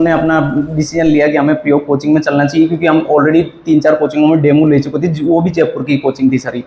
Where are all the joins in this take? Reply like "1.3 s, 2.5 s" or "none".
none

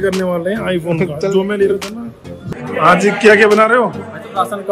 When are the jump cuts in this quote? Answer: 2.4 s

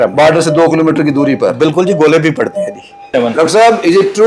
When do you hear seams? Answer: 3.1 s

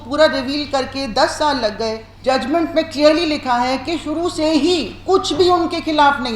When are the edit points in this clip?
2.1 s

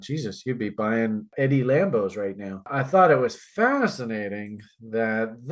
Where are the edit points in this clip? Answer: 1.3 s, 2.7 s

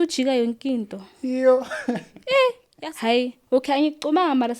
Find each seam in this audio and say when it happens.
2.7 s

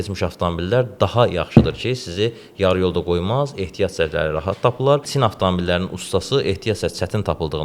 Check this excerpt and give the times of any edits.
5.1 s

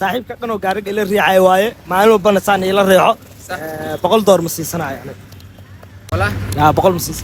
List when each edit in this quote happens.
none

